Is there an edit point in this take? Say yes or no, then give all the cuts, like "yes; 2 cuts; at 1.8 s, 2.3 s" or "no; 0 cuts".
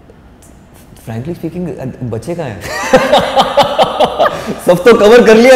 no; 0 cuts